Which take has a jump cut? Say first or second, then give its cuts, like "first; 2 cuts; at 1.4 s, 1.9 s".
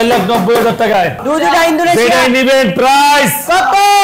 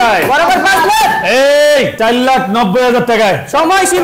first; 1 cut; at 1.2 s